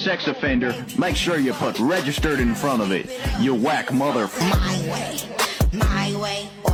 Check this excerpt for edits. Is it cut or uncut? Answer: uncut